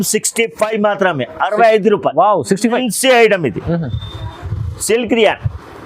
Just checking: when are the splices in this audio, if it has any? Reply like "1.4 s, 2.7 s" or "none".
2.8 s